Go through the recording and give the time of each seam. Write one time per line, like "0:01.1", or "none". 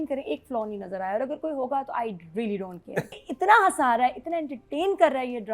0:03.3